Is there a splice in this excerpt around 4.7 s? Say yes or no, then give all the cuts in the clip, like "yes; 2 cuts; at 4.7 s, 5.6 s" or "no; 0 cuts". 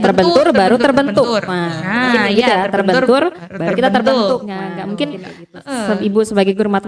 yes; 1 cut; at 4.7 s